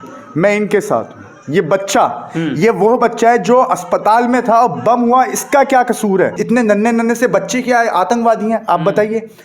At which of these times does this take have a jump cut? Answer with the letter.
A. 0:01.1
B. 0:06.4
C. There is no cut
B